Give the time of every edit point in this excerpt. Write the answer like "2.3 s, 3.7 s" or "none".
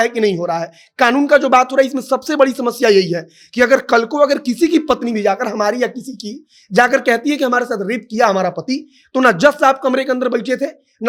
none